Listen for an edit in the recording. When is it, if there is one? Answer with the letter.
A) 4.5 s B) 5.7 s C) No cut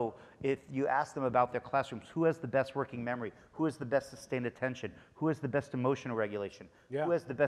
C